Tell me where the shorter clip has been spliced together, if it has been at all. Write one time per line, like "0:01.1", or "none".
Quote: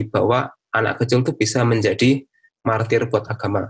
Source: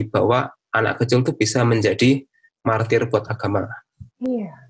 none